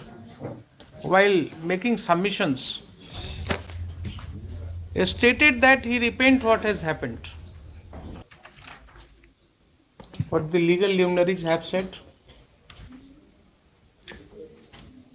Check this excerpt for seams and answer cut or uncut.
cut